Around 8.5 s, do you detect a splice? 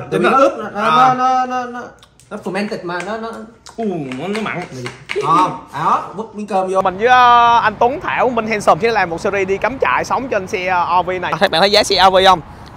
no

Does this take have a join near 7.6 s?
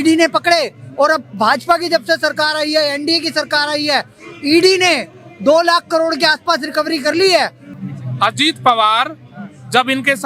yes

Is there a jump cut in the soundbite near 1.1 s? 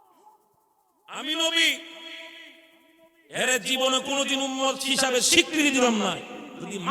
yes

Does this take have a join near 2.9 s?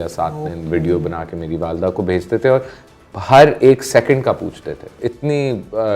no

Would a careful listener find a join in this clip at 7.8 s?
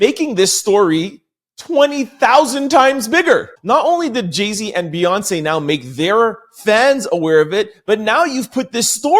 no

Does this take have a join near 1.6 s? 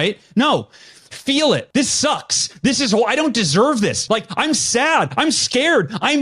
yes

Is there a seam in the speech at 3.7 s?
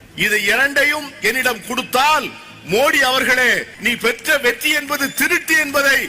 yes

